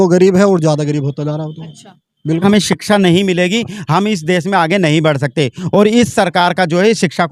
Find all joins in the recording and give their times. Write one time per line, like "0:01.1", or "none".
0:02.4